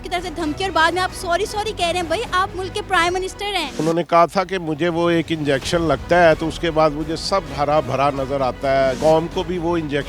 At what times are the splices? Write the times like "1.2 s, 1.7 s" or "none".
3.8 s, 9.0 s